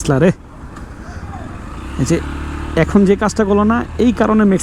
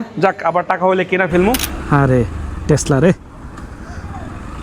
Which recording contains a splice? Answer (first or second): second